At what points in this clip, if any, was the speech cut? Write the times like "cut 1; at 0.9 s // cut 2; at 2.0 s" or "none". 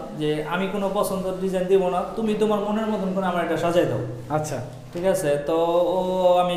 none